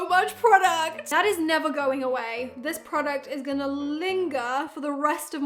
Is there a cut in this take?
no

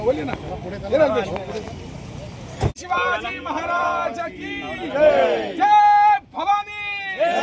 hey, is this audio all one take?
no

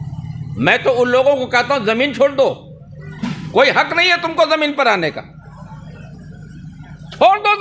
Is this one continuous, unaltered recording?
yes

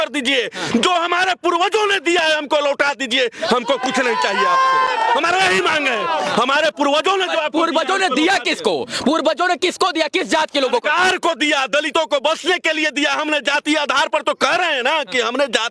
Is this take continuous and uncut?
yes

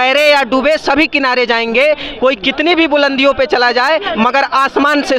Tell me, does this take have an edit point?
no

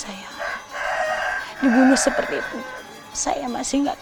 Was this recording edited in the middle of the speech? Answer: no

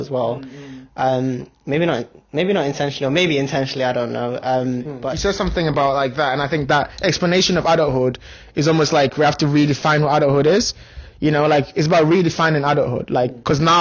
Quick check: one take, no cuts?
no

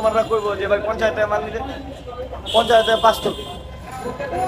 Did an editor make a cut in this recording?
no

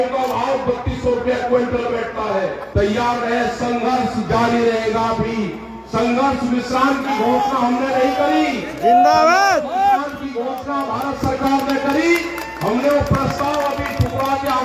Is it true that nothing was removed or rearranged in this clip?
no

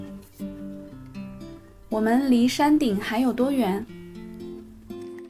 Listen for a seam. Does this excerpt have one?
yes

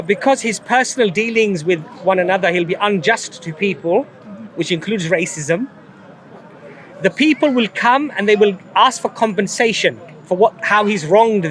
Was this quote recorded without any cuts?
yes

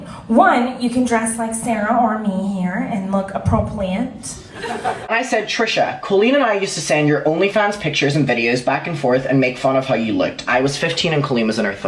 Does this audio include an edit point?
yes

